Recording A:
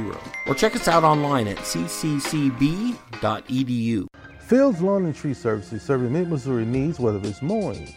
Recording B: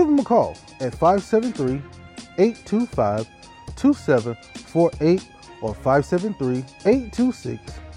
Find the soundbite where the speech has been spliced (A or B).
A